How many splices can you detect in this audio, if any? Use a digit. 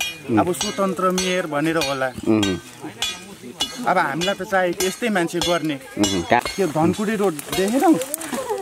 1